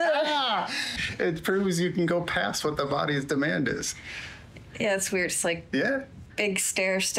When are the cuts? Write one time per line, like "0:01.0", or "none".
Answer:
0:01.0